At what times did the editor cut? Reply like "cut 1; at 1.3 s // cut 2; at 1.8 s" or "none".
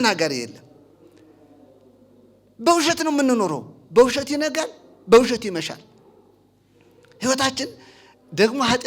none